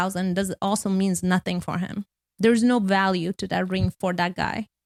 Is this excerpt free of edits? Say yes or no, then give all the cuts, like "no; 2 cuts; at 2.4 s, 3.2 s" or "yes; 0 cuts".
yes; 0 cuts